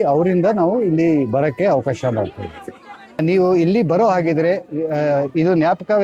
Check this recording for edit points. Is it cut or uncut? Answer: cut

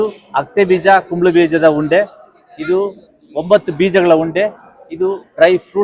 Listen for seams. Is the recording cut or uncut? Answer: uncut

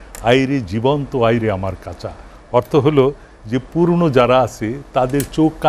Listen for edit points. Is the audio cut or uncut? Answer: uncut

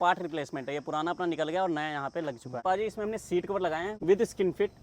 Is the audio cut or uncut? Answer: cut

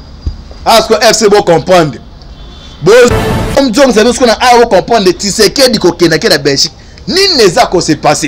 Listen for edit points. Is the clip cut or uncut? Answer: cut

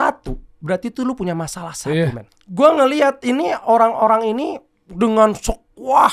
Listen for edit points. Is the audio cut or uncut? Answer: cut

